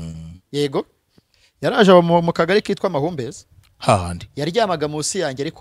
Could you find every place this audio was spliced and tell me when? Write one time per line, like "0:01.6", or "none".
none